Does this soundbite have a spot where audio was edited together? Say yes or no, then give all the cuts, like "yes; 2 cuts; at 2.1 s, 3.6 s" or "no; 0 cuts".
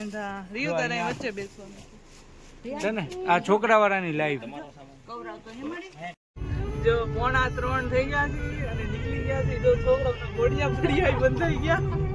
no; 0 cuts